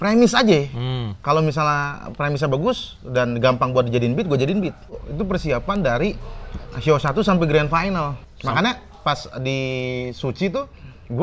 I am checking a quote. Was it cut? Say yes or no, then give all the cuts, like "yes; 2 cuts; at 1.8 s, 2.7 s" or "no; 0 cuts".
yes; 2 cuts; at 5.0 s, 8.3 s